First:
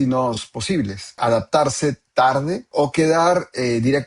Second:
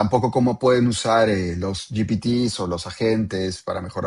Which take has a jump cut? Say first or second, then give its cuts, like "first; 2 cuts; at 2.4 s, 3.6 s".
first; 2 cuts; at 1.2 s, 2.6 s